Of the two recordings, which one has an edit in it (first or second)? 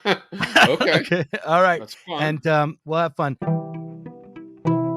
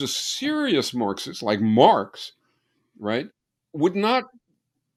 first